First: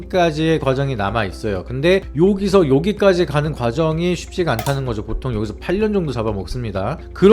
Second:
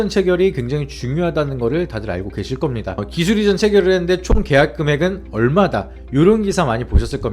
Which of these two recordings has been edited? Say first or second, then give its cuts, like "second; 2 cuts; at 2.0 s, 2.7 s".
second; 1 cut; at 3.0 s